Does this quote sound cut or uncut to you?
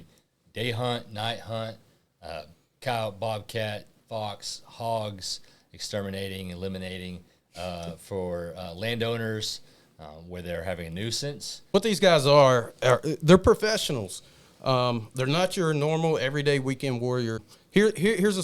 cut